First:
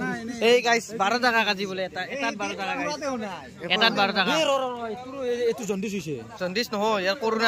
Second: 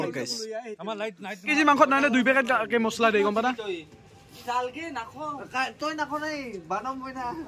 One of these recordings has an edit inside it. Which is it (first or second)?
second